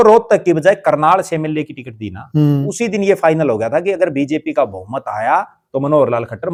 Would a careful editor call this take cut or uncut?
uncut